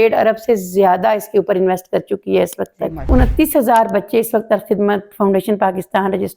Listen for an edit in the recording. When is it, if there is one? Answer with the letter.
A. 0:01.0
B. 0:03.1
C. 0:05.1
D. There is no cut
B